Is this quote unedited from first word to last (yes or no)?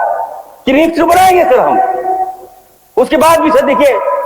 yes